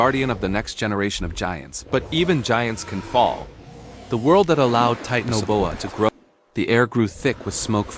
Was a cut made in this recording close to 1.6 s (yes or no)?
no